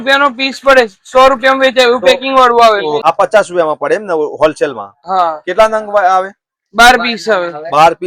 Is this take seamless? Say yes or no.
no